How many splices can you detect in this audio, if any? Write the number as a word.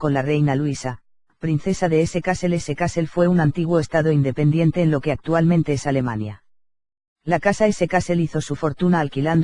one